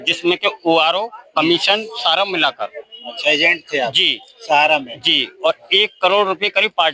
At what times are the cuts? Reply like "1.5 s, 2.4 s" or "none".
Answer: none